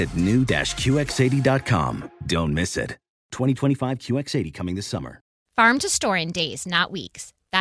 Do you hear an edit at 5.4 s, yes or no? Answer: yes